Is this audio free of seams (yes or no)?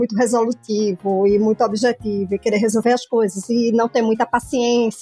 yes